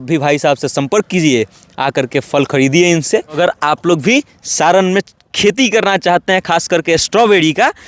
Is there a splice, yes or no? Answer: yes